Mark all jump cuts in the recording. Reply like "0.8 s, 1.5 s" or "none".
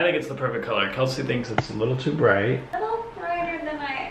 2.7 s